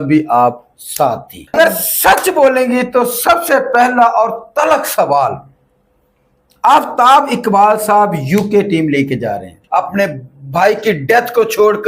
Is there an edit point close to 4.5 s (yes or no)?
no